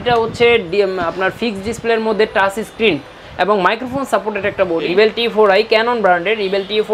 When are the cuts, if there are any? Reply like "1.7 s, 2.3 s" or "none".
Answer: 4.9 s